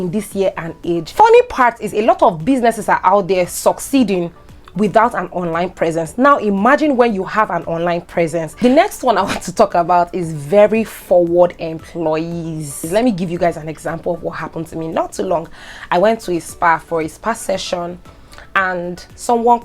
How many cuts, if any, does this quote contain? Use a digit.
3